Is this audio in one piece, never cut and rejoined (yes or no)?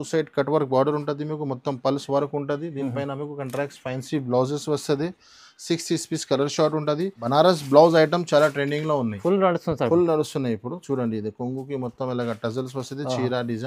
no